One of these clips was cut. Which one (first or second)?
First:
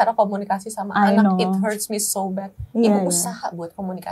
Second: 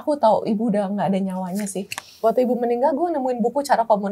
second